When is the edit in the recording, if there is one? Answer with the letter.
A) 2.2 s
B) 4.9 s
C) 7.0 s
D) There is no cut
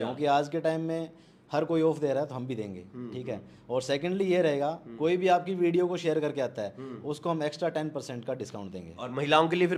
D